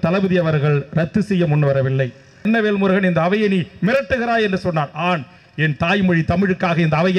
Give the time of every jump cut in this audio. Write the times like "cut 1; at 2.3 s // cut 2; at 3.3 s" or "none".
cut 1; at 2.4 s